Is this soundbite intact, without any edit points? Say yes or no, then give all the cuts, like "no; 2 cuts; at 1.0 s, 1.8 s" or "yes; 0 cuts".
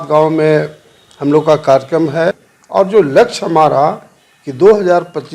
no; 1 cut; at 2.2 s